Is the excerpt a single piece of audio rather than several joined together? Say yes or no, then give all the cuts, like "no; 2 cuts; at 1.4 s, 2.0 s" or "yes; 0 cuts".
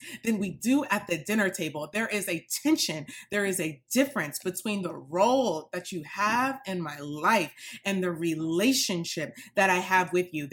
yes; 0 cuts